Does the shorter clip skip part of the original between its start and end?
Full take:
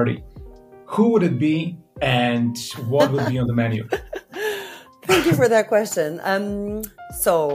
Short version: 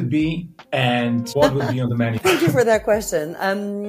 yes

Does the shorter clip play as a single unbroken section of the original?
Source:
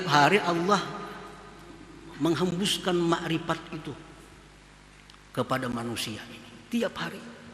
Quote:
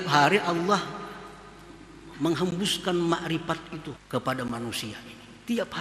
no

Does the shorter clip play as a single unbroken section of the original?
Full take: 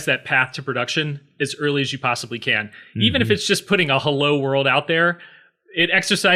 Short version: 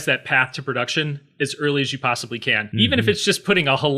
no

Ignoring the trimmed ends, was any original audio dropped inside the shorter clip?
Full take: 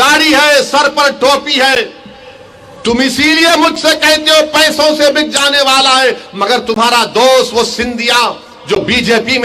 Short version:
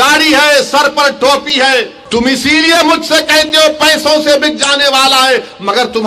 yes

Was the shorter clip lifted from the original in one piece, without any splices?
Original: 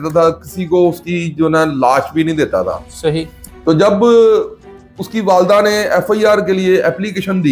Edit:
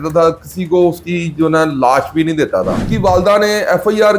no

